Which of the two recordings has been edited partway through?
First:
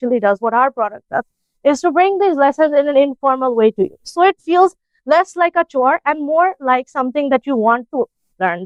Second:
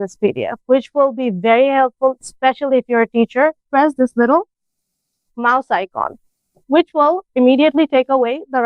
second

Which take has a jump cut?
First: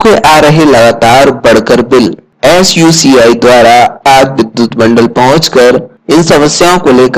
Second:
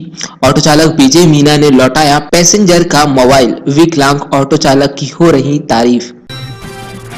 second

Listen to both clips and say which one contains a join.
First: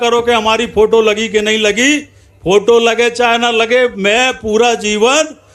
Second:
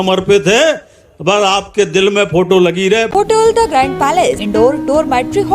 second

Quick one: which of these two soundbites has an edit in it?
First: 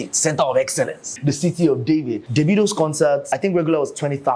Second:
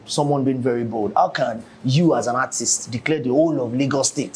first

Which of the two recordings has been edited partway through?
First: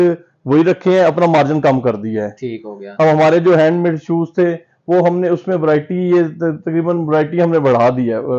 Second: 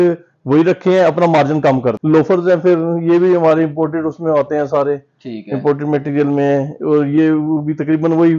second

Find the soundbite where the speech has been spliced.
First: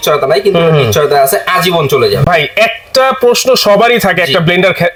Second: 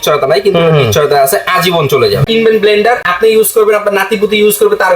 second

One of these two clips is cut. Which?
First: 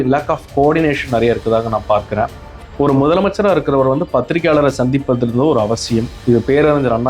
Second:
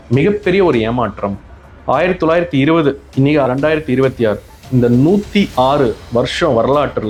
first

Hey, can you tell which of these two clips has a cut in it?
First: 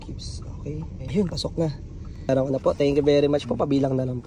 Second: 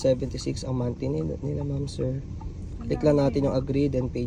first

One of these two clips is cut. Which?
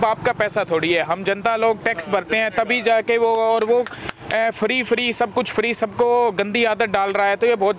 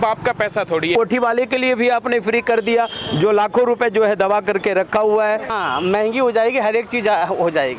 second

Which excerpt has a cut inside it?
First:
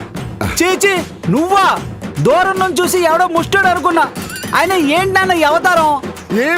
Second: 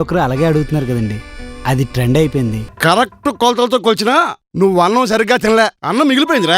second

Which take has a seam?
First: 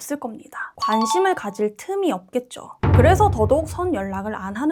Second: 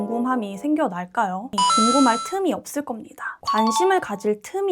second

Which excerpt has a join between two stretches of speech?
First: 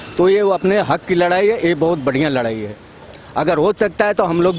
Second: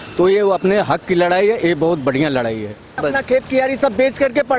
second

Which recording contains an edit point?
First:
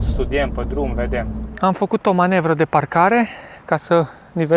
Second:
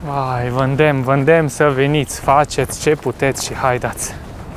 first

